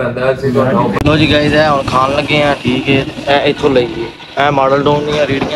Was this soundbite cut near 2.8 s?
no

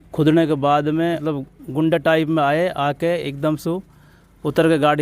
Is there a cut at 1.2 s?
yes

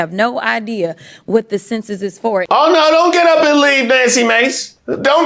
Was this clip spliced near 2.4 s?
yes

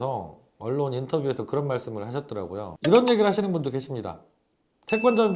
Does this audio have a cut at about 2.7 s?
yes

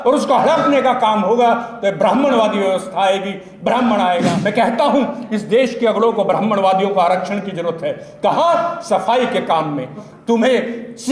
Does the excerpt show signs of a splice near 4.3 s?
yes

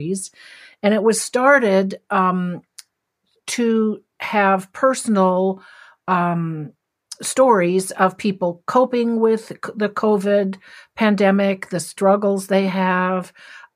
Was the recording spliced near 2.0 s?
no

